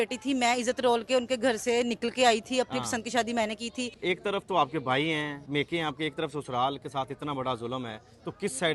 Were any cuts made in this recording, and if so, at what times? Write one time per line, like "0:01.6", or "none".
0:03.9
0:05.4